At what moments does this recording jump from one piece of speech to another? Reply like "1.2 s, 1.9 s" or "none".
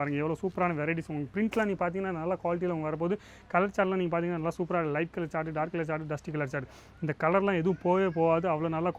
none